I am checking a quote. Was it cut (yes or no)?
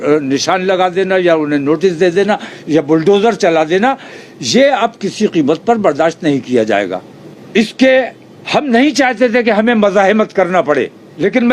no